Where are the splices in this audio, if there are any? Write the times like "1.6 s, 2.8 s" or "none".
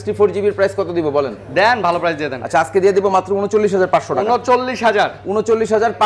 none